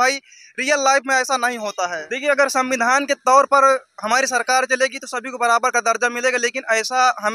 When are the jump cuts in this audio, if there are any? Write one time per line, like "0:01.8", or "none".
0:02.1